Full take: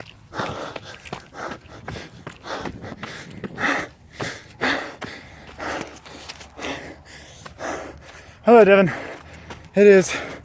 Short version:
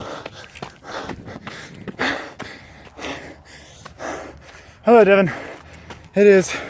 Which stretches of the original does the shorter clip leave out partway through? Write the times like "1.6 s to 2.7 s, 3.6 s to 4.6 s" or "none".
1.4 s to 2.5 s, 3.5 s to 4.6 s, 5.4 s to 6.4 s